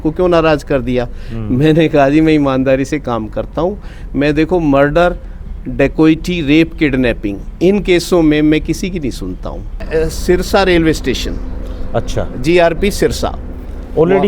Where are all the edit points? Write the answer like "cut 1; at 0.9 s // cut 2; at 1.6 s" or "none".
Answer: cut 1; at 9.8 s